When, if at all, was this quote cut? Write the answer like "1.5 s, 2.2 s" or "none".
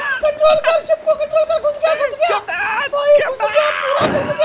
2.9 s